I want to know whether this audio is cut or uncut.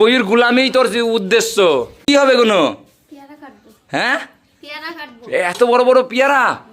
cut